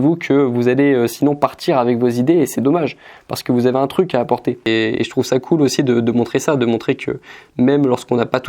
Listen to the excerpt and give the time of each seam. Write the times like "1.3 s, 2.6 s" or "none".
4.7 s